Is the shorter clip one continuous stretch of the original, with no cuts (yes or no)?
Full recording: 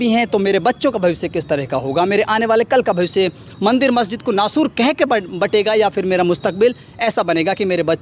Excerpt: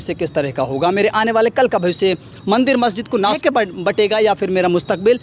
no